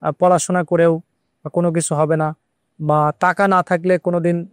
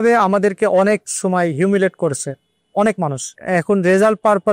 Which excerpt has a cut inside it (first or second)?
second